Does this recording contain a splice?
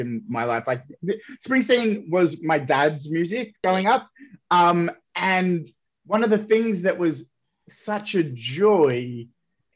yes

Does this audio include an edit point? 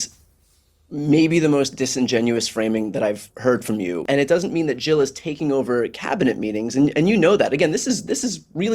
yes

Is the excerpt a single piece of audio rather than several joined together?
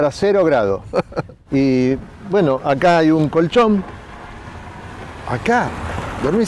no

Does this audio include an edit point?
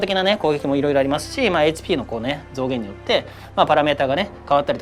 no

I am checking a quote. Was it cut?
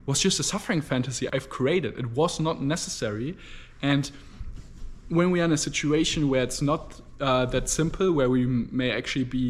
no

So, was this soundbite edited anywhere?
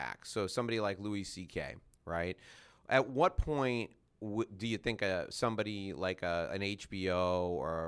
no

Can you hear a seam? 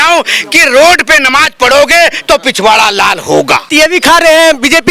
yes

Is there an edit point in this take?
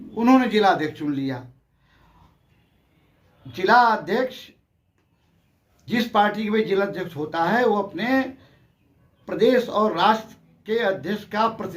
no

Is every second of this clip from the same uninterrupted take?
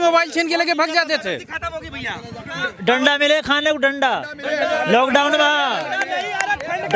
no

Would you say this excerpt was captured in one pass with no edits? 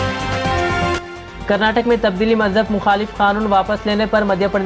no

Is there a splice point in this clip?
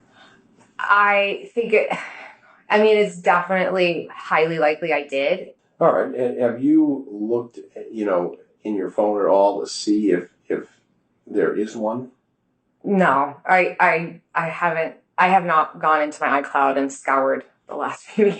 yes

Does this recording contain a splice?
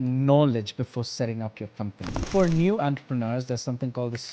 yes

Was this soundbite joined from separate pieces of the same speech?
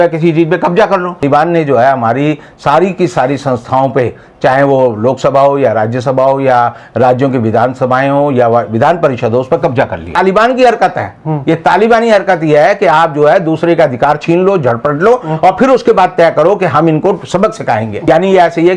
yes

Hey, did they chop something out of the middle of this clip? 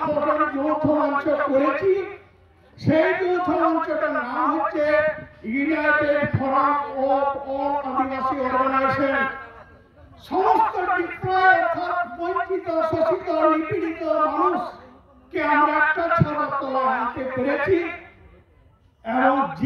no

